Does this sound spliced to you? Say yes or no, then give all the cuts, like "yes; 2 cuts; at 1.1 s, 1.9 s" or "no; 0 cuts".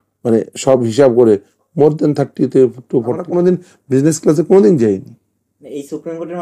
yes; 1 cut; at 3.3 s